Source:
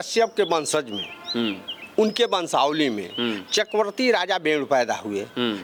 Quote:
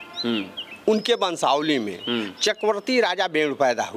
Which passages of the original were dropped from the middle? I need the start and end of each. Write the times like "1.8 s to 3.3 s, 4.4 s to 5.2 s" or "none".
none